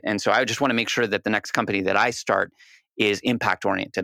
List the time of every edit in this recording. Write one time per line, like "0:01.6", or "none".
none